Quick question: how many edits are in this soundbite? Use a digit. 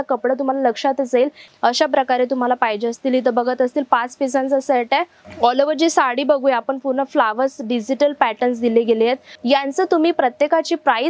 3